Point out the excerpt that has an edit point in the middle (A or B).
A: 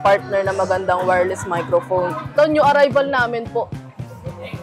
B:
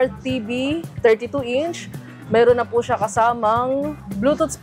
A